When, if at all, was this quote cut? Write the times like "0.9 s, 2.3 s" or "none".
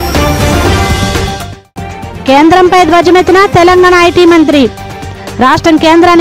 2.1 s